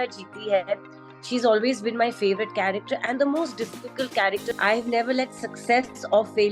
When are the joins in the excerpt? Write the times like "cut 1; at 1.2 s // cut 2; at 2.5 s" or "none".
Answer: cut 1; at 4.5 s